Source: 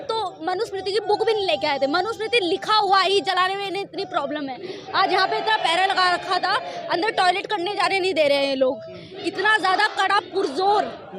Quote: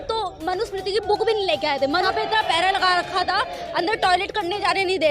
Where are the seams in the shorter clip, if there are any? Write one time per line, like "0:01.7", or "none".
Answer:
0:02.1